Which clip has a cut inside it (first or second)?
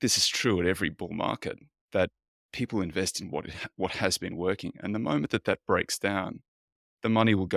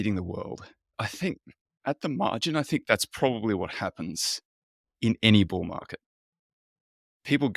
second